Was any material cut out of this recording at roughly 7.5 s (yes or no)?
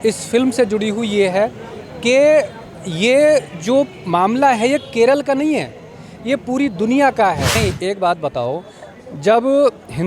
yes